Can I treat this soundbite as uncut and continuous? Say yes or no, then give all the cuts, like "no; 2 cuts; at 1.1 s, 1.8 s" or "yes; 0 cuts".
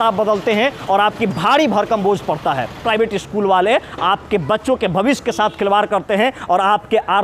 no; 1 cut; at 2.8 s